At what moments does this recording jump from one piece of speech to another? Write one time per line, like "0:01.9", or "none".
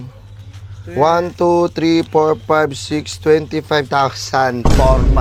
none